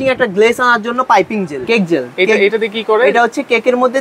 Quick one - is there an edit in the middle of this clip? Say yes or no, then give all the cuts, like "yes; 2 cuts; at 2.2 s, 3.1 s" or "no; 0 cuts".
yes; 1 cut; at 1.6 s